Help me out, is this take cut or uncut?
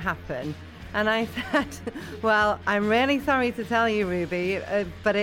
uncut